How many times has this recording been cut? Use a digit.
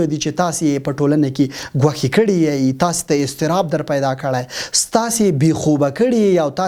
0